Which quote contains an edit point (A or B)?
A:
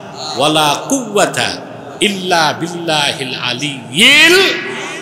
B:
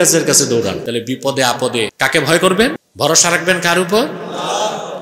B